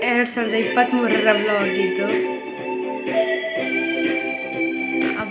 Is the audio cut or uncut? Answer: uncut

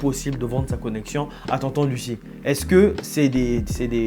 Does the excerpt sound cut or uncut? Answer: uncut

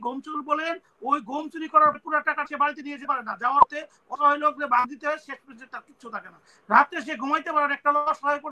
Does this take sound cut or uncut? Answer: uncut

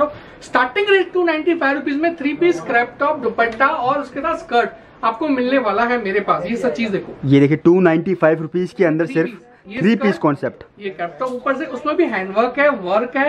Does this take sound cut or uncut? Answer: uncut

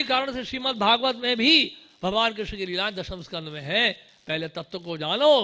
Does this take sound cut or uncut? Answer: uncut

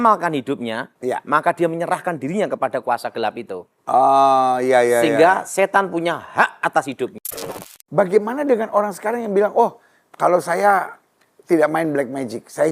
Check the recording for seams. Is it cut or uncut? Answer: cut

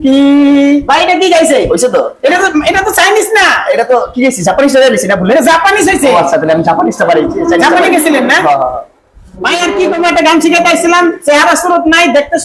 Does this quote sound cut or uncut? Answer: uncut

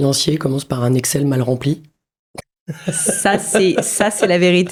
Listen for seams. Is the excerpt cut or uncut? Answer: uncut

